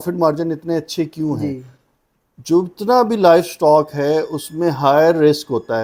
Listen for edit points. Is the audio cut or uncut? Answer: uncut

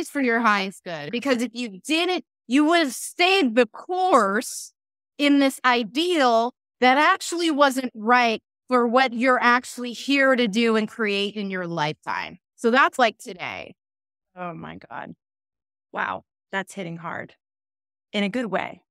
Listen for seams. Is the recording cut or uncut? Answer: cut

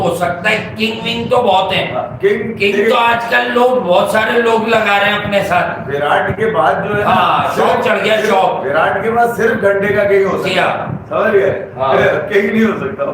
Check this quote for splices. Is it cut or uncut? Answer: uncut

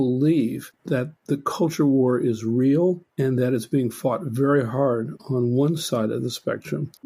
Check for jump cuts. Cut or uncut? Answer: uncut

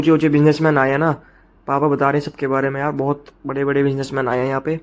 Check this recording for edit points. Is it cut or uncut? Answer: uncut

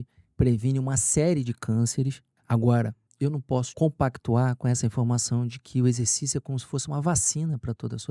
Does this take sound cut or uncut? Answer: cut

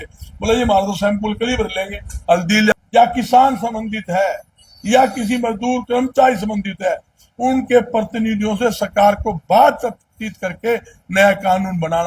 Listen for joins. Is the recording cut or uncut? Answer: cut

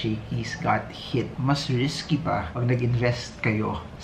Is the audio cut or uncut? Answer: cut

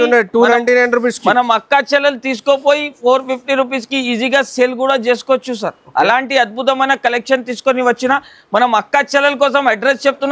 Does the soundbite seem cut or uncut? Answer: uncut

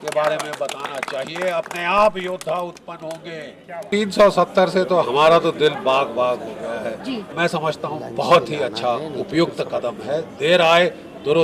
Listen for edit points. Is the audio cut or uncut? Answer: cut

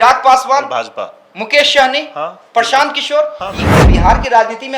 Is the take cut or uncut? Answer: cut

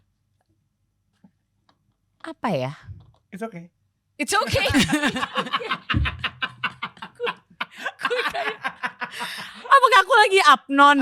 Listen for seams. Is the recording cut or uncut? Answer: uncut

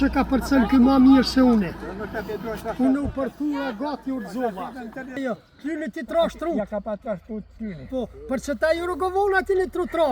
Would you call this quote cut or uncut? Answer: cut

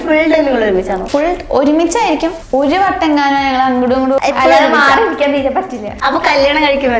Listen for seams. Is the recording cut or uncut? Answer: cut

